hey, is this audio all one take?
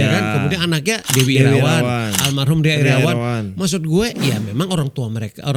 no; 1 cut; at 1.1 s

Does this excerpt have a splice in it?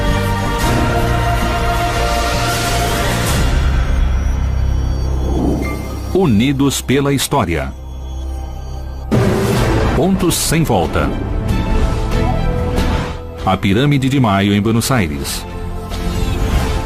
yes; 1 cut; at 6.8 s

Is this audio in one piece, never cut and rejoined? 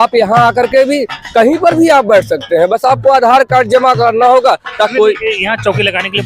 no; 1 cut; at 4.9 s

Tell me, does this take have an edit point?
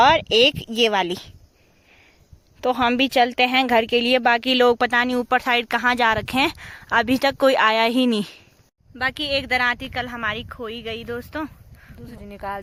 no; 0 cuts

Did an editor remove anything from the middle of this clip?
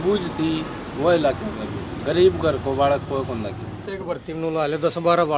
yes; 2 cuts; at 1.9 s, 3.9 s

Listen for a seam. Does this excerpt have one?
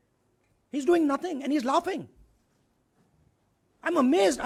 no; 0 cuts

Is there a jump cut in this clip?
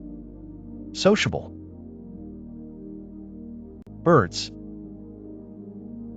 no; 0 cuts

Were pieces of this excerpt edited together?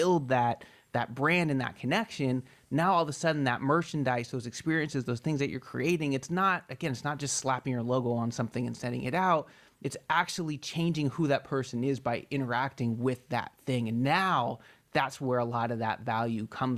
no; 0 cuts

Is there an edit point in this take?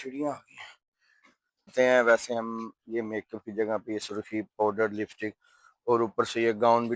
yes; 1 cut; at 1.7 s

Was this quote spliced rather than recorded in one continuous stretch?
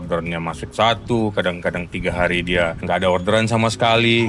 yes; 1 cut; at 2.8 s

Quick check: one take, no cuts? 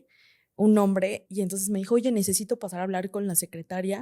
no; 1 cut; at 1.2 s

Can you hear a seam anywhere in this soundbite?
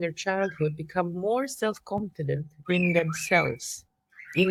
no; 0 cuts

